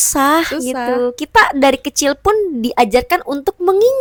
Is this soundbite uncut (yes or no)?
yes